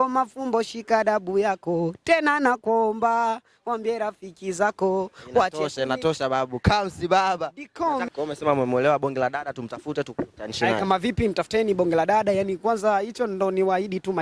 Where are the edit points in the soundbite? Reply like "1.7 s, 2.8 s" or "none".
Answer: 8.1 s